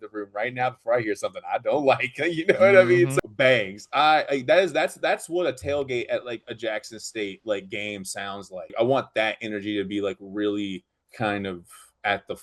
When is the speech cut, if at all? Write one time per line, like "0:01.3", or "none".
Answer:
0:03.1
0:08.7